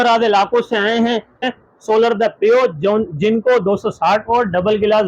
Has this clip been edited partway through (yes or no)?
yes